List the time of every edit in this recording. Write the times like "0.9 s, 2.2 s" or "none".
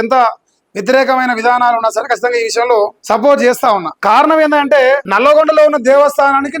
3.0 s, 3.9 s, 5.1 s